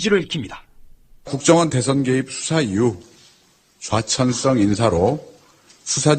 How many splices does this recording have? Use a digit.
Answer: 0